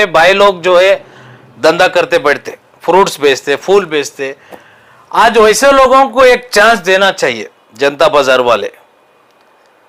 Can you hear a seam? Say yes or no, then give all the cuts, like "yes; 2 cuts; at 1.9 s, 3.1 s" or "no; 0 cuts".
no; 0 cuts